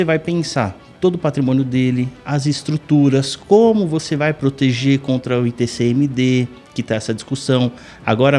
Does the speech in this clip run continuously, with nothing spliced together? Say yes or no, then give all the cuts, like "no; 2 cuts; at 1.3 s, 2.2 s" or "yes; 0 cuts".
yes; 0 cuts